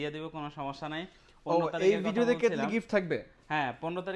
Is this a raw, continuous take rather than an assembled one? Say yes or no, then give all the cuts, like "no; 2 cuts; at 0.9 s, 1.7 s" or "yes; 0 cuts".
yes; 0 cuts